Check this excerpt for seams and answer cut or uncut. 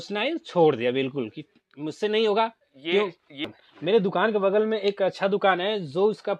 cut